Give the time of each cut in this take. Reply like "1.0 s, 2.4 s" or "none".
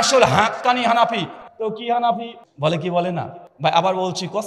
2.4 s, 3.4 s

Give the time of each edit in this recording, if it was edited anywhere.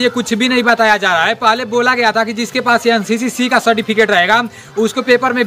none

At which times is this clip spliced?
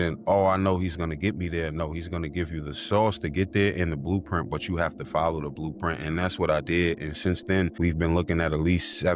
none

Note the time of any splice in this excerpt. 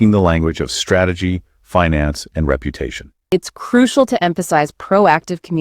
3.2 s

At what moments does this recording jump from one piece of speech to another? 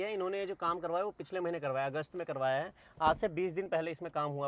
none

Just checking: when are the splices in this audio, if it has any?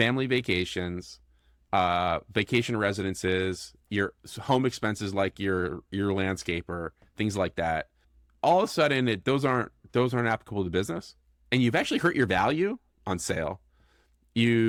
none

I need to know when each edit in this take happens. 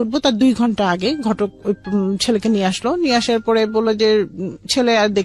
none

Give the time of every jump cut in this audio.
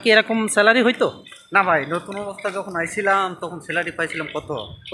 none

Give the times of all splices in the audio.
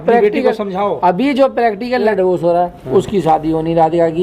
2.1 s

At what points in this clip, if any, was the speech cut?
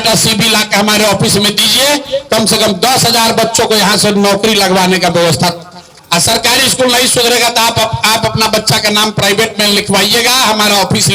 5.8 s

